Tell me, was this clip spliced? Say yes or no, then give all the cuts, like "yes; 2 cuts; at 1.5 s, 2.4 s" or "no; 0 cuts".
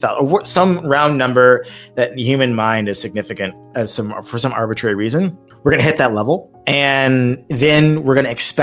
yes; 2 cuts; at 5.5 s, 6.5 s